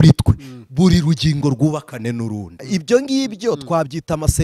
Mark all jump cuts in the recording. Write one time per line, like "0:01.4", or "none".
0:02.5